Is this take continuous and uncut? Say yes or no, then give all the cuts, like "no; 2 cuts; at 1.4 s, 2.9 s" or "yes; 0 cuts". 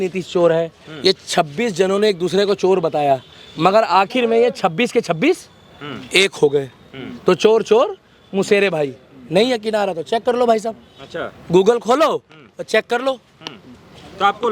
yes; 0 cuts